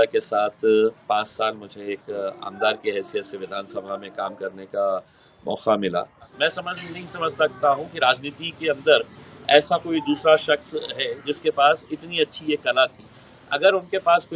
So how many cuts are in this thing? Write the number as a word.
one